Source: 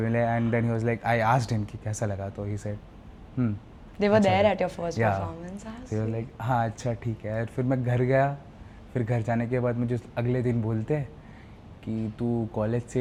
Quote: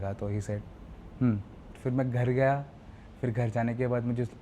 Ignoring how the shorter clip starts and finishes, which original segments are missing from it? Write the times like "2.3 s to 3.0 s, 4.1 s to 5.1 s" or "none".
3.9 s to 7.5 s